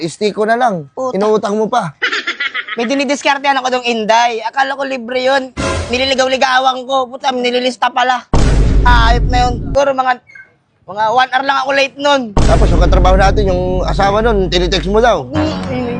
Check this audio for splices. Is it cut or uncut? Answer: cut